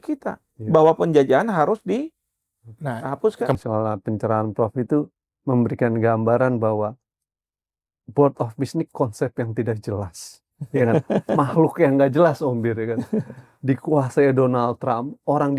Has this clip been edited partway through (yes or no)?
yes